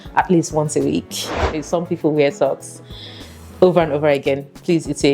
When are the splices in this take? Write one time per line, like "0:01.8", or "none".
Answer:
0:01.6

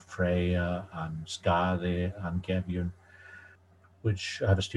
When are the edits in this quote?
none

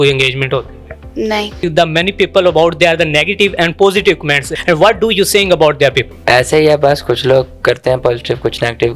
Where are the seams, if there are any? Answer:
0:01.6
0:04.5
0:06.1

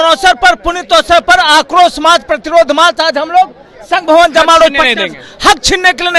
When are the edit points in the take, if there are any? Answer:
none

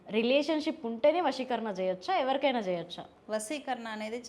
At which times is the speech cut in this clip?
none

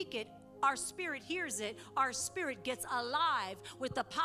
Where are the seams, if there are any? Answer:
none

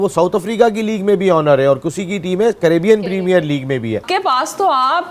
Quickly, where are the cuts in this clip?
0:04.0

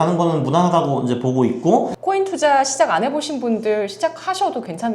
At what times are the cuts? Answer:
0:01.9

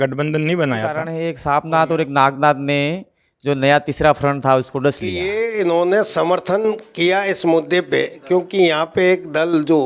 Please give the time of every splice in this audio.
0:01.1
0:05.2

